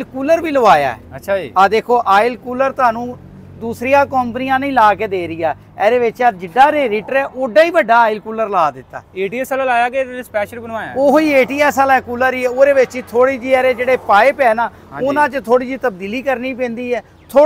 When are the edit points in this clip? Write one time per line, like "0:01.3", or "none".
none